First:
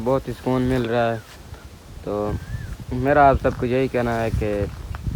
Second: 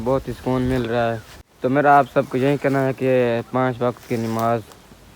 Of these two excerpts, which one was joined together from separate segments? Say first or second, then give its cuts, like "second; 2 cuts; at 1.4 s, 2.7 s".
second; 1 cut; at 1.5 s